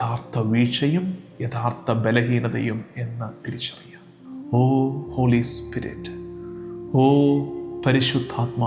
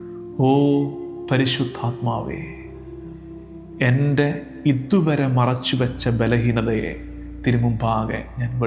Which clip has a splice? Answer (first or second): first